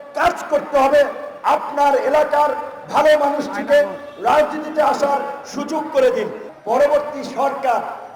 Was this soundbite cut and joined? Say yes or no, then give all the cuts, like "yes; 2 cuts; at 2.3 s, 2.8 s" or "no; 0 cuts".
yes; 1 cut; at 6.4 s